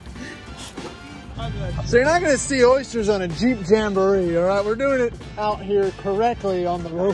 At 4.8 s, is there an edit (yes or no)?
no